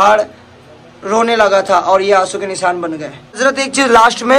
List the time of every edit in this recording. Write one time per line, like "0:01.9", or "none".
none